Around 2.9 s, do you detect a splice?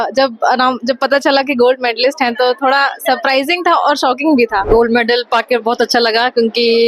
no; 1 cut; at 4.6 s

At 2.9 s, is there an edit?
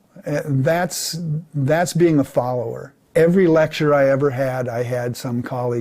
yes; 1 cut; at 2.9 s

